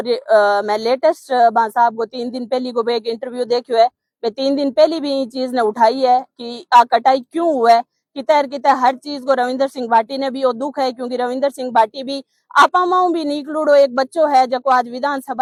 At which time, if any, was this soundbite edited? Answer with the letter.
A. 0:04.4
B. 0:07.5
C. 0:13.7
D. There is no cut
D